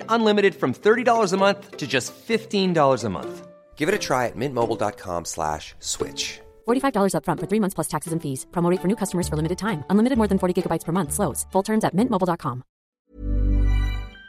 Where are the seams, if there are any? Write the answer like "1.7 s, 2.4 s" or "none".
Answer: 12.9 s